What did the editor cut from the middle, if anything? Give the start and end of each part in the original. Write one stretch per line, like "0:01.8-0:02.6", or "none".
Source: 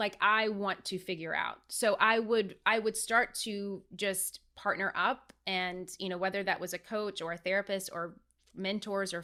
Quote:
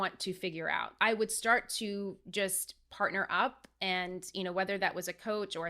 0:01.6-0:02.6